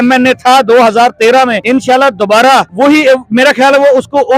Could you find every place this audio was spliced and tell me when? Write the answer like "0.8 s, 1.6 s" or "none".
1.6 s, 2.7 s